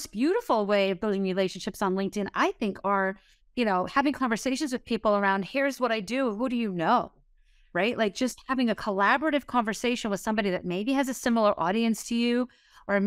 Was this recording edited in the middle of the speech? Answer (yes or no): no